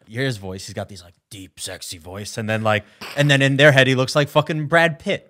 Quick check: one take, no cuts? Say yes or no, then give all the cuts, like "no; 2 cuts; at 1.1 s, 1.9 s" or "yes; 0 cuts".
yes; 0 cuts